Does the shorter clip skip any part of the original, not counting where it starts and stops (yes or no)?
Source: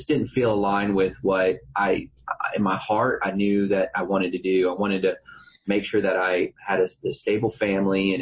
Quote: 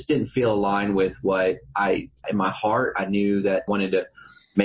yes